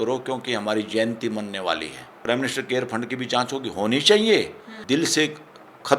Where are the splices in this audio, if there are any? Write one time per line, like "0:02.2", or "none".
0:02.0
0:04.7